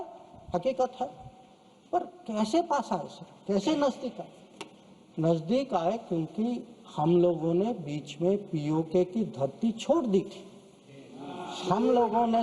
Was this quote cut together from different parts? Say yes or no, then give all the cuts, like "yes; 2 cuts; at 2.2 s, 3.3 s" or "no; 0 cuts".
no; 0 cuts